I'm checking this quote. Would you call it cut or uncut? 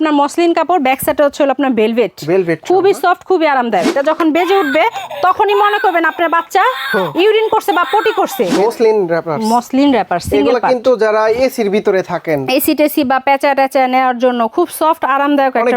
cut